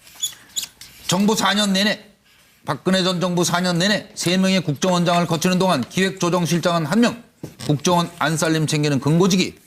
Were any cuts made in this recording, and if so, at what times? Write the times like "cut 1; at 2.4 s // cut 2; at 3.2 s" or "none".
cut 1; at 8.2 s